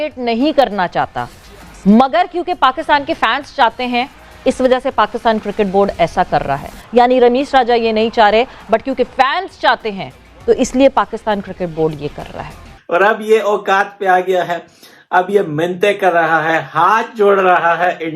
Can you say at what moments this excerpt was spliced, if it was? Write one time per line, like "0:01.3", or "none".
0:12.7